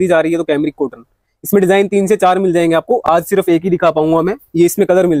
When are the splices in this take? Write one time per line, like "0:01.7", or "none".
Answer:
none